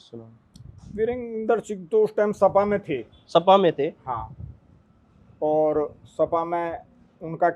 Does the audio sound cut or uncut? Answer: uncut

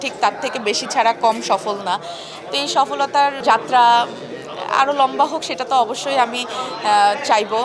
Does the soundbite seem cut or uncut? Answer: uncut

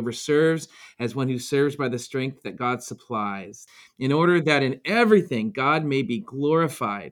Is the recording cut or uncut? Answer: cut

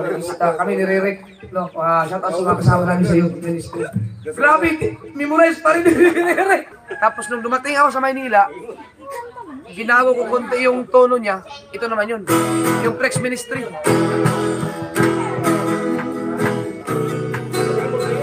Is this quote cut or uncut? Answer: cut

